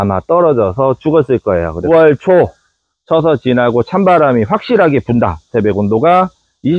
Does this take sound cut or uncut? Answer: cut